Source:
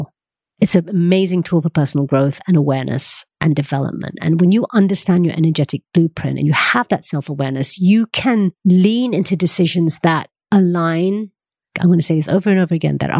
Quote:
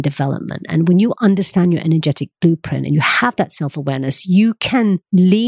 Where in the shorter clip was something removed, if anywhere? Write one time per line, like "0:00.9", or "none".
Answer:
none